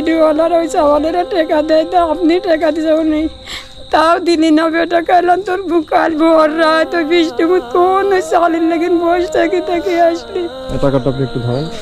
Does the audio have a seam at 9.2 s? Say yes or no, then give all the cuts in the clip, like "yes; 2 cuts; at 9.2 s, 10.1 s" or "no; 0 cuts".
no; 1 cut; at 10.6 s